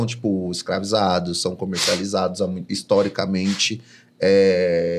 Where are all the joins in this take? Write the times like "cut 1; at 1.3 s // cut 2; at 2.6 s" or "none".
none